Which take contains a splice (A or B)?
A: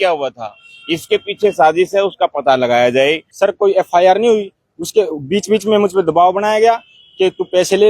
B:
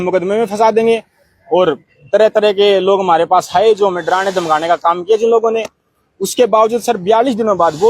A